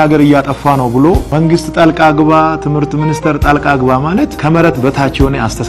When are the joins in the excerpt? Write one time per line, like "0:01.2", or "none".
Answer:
0:01.3
0:04.4

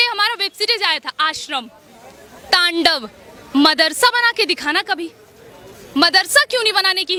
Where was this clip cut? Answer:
none

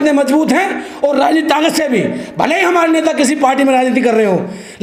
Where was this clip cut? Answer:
none

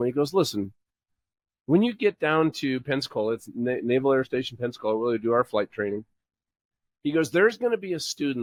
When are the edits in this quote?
none

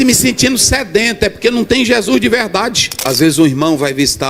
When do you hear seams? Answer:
0:02.9

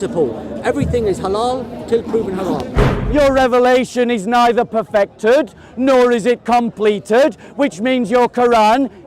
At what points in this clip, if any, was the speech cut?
0:02.9

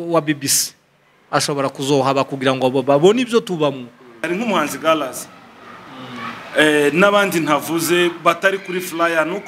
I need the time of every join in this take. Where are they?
0:04.2

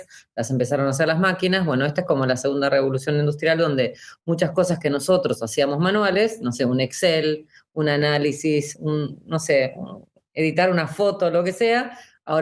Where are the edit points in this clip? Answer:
none

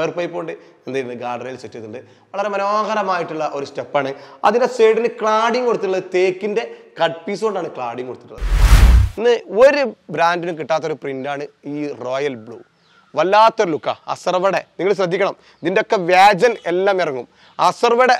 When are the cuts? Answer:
0:08.7

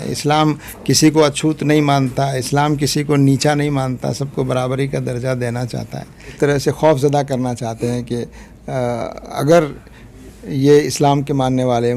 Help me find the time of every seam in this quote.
0:06.3

